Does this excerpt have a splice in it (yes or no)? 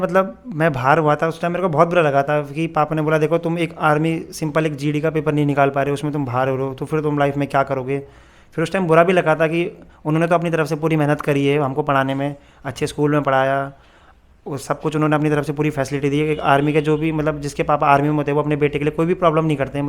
no